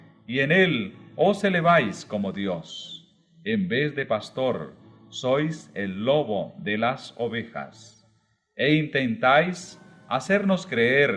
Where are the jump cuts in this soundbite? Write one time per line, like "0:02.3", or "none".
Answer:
none

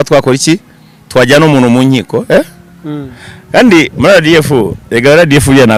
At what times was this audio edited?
none

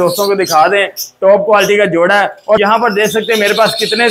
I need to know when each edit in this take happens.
0:02.6

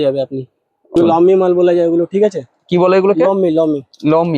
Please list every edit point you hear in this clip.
0:01.0

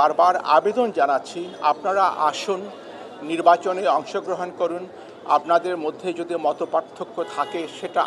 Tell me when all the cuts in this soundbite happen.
none

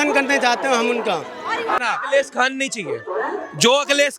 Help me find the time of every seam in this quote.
0:01.8

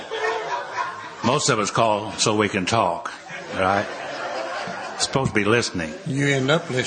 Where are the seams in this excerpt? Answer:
none

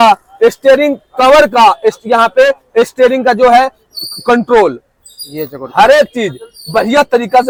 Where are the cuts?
none

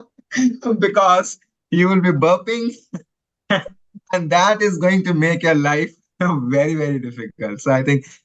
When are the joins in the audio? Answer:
none

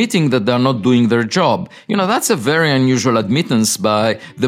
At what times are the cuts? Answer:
none

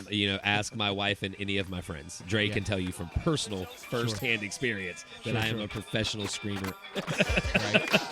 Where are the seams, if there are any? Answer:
0:06.8

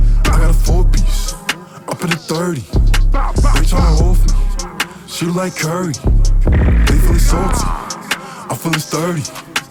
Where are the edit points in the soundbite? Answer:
none

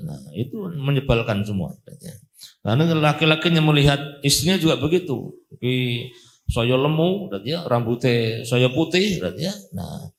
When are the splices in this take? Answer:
none

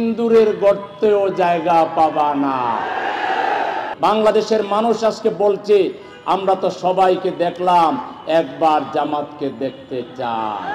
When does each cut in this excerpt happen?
0:03.9

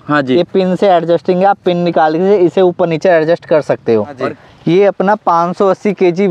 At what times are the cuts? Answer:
0:04.3

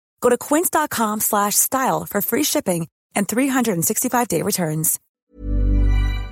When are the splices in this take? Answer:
0:05.3

